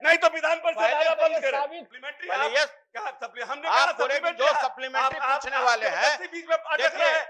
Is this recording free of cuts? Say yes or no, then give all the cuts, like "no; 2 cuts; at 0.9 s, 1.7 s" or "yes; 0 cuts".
no; 1 cut; at 1.8 s